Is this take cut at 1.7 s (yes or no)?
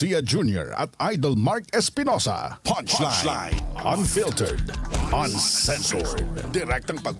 no